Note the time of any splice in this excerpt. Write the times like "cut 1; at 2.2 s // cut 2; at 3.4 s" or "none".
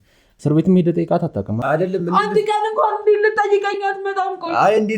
cut 1; at 1.6 s